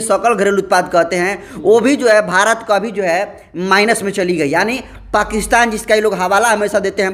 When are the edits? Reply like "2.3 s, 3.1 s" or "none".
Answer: none